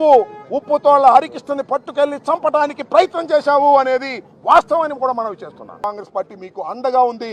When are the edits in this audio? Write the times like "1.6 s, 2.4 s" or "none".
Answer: 5.7 s

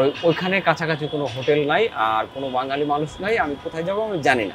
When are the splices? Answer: none

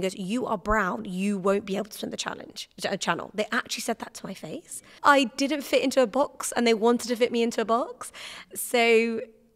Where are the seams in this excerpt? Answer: 4.9 s, 8.4 s

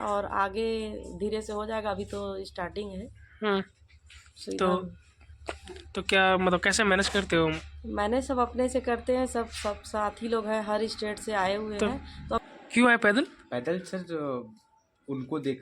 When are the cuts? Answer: 12.3 s

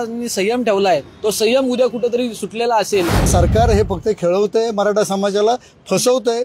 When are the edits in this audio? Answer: 3.3 s

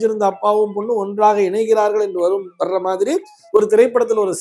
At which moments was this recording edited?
none

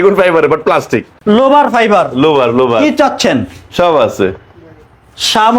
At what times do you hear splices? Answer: 1.1 s

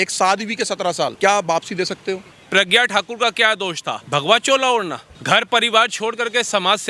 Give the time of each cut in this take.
1.1 s, 2.3 s, 3.9 s, 5.1 s

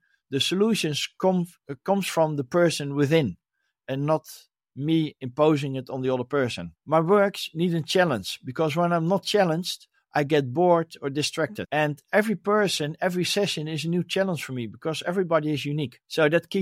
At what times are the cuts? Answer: none

